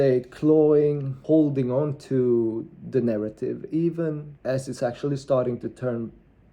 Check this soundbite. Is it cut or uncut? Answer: cut